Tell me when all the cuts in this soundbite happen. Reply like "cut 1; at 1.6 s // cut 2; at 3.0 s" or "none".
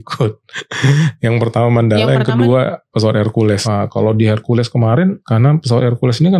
cut 1; at 3.6 s // cut 2; at 5.2 s